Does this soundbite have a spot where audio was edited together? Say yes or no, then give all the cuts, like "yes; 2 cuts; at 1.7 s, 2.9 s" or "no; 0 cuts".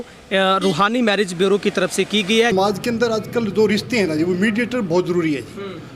yes; 1 cut; at 2.5 s